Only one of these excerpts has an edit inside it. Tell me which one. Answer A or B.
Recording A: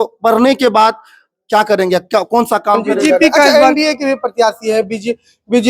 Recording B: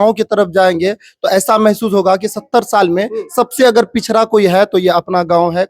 A